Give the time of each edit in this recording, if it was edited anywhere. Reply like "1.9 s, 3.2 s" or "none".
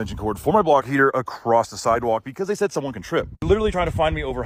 none